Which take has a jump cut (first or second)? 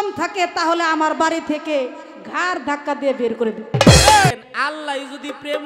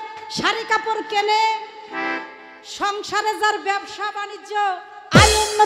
first